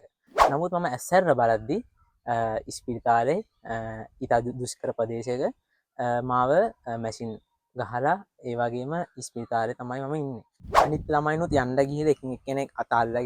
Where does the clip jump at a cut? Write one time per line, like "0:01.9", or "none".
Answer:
0:10.5